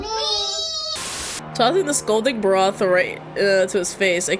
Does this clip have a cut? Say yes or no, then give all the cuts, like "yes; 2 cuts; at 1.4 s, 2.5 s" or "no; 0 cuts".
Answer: yes; 1 cut; at 1.0 s